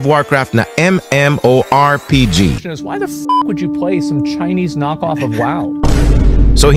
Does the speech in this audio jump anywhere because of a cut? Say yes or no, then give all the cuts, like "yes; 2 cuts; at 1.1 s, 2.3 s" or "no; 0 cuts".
no; 0 cuts